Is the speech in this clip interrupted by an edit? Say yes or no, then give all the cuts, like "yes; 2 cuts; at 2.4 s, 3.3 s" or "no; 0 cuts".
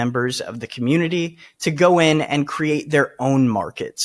no; 0 cuts